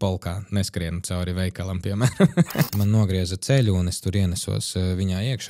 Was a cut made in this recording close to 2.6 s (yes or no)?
yes